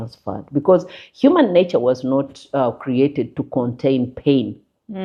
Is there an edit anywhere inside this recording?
no; 0 cuts

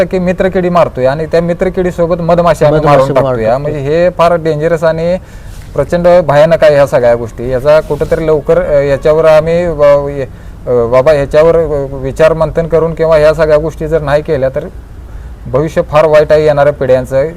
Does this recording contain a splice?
no; 0 cuts

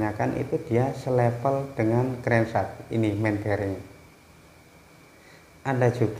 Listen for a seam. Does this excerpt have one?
yes; 1 cut; at 4.3 s

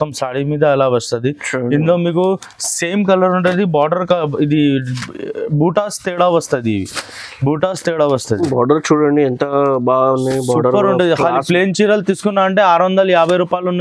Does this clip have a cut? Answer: no; 0 cuts

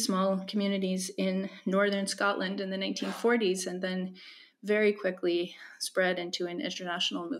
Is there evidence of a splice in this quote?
no; 0 cuts

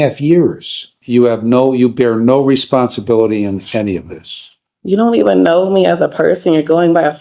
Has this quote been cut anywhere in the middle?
yes; 1 cut; at 1.0 s

